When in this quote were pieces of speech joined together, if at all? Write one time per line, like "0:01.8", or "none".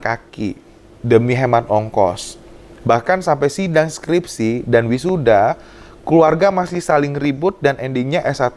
none